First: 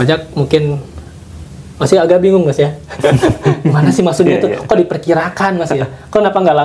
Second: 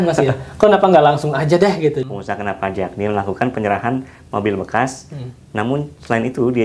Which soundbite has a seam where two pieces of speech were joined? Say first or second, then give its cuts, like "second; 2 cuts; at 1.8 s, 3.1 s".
second; 1 cut; at 2.0 s